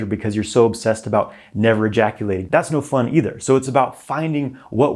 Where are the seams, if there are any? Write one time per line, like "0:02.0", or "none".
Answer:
0:02.4